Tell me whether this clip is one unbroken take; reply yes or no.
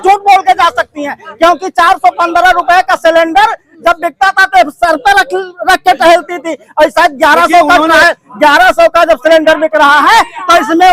yes